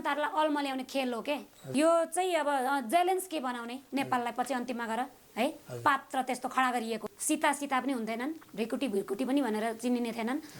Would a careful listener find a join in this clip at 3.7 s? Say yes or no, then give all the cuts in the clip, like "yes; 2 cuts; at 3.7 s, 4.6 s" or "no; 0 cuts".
no; 2 cuts; at 1.7 s, 7.0 s